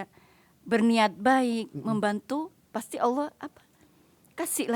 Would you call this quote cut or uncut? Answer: uncut